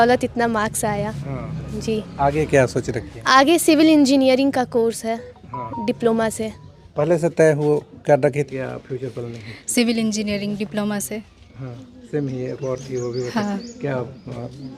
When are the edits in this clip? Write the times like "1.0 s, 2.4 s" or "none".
8.5 s

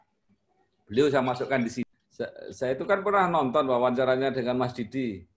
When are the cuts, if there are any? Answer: 1.8 s

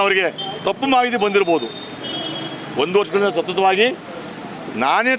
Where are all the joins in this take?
none

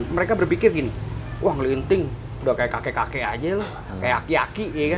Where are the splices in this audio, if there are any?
none

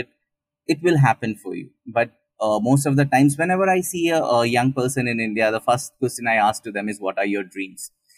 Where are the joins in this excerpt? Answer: none

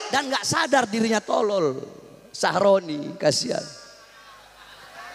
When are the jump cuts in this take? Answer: none

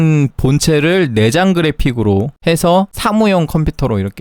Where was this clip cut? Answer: 2.9 s

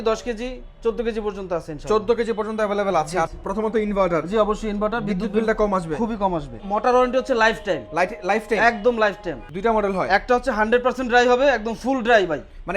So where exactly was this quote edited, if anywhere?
3.3 s, 6.6 s, 9.4 s

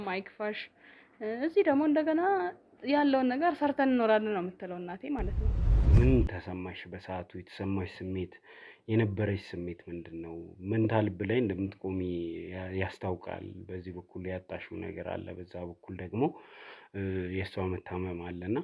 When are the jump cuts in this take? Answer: 5.7 s

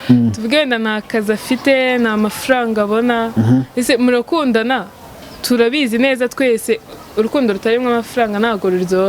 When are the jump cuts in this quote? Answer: none

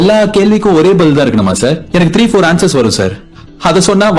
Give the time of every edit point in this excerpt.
none

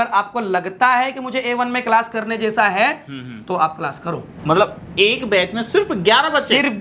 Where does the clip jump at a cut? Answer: 4.3 s

